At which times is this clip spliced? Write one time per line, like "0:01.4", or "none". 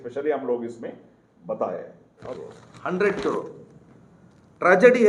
0:02.2